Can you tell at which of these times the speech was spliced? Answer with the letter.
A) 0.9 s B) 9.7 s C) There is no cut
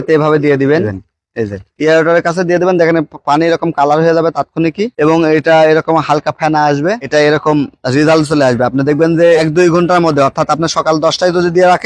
A